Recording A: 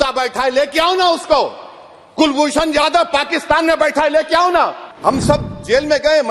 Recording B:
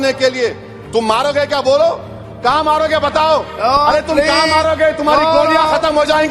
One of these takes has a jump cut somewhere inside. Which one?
A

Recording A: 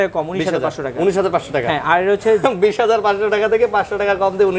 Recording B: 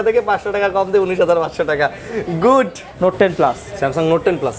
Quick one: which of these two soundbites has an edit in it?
B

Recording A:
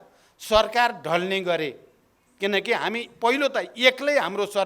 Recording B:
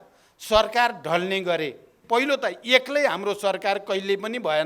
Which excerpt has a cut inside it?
B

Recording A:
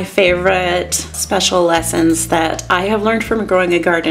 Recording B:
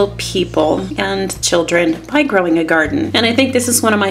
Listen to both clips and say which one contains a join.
B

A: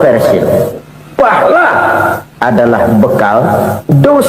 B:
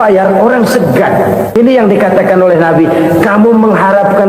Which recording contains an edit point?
B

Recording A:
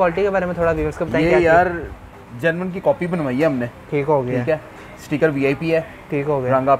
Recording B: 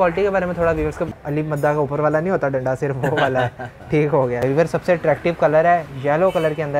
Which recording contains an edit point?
B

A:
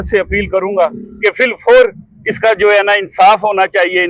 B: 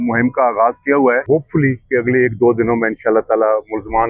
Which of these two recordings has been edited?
B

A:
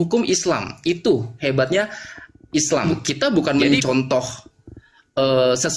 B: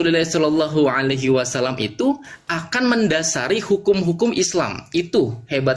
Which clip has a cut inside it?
A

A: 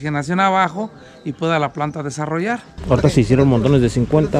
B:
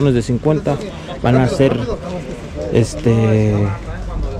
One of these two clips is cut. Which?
A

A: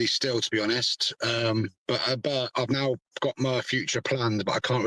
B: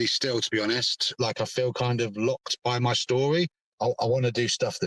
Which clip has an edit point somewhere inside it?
B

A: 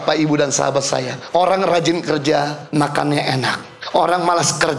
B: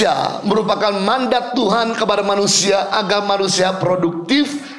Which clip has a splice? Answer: A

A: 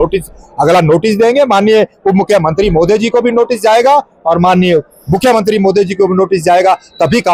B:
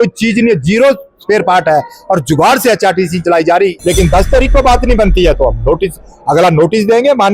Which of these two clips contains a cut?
B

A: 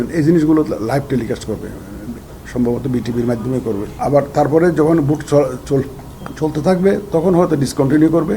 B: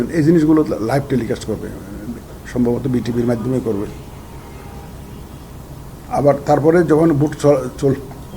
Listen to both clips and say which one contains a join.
A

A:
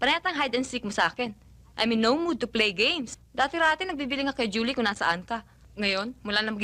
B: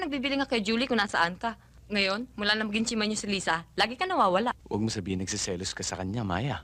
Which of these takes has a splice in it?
B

